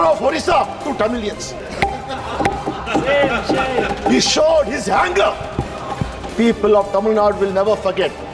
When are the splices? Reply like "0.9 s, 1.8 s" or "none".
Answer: 1.6 s